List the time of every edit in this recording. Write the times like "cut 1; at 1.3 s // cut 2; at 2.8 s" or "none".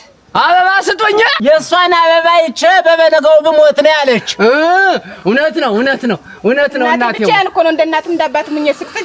cut 1; at 1.4 s